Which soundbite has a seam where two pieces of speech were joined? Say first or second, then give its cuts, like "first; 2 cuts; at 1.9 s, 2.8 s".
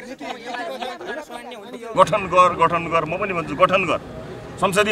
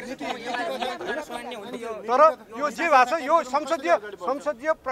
first; 1 cut; at 1.8 s